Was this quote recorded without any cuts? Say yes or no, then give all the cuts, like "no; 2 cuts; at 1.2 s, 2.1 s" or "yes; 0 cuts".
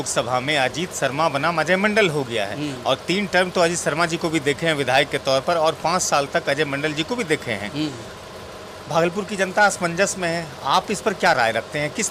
yes; 0 cuts